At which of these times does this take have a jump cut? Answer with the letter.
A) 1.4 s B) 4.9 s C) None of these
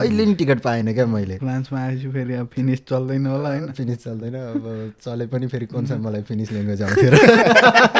A